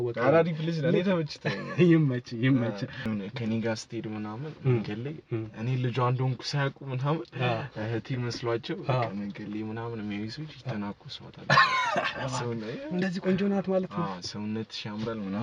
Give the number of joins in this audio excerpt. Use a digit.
1